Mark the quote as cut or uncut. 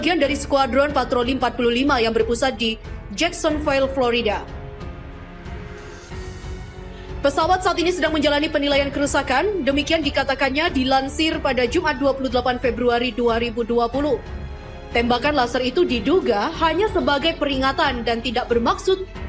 uncut